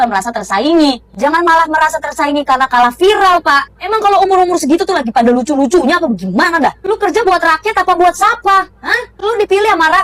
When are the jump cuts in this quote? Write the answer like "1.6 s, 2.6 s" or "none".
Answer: none